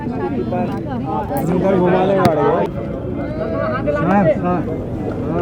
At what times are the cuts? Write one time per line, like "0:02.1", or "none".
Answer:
none